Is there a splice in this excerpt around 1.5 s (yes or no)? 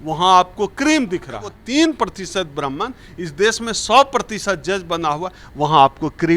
yes